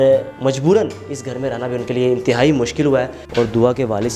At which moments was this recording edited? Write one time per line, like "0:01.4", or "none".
0:03.2